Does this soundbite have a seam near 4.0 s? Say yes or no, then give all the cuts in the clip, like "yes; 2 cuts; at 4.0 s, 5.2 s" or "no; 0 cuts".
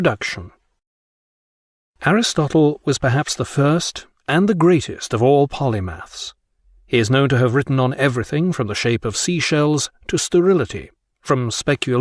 no; 0 cuts